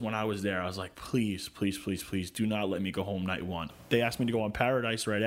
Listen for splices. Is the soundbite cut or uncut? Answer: cut